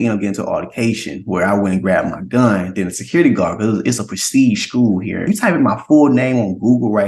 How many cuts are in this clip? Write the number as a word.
one